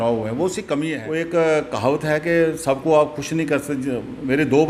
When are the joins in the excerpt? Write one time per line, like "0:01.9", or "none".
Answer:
0:00.9